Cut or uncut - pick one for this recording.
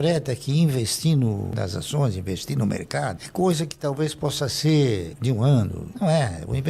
uncut